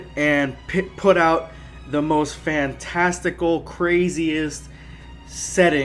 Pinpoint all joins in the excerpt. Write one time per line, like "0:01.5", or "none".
0:03.6